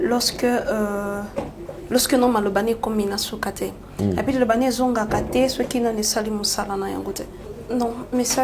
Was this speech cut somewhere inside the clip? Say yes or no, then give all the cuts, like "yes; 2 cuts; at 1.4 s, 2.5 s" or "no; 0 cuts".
yes; 1 cut; at 7.5 s